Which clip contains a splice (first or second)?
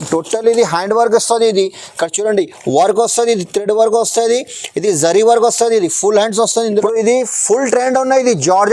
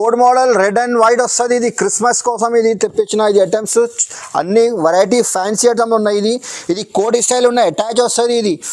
first